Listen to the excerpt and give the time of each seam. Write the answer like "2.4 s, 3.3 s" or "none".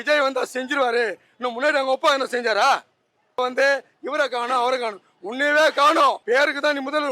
3.4 s, 6.2 s